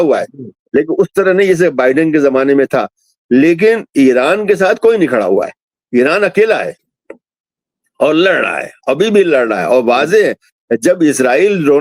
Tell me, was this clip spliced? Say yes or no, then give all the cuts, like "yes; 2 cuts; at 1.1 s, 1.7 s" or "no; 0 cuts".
no; 0 cuts